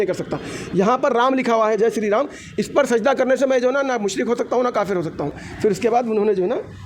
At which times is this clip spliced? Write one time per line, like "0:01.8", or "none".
0:05.4